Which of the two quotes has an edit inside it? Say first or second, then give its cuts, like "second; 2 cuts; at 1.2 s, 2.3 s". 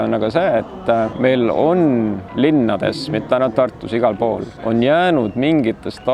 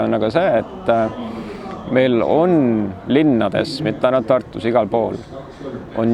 first; 2 cuts; at 1.1 s, 4.5 s